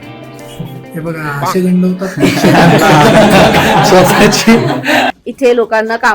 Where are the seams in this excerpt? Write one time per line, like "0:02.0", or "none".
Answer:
0:05.1